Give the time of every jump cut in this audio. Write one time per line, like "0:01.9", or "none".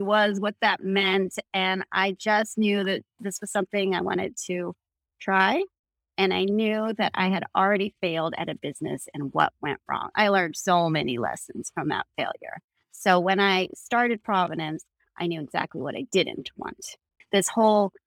0:17.1